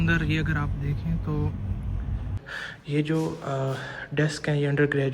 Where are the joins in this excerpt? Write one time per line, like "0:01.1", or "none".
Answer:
0:02.4